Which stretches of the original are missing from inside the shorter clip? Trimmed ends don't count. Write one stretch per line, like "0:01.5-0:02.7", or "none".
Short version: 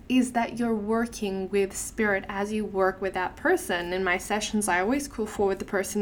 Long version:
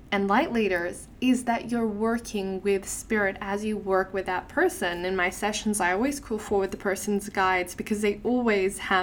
none